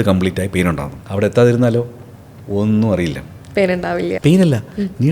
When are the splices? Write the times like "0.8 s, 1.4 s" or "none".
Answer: 0.9 s, 4.1 s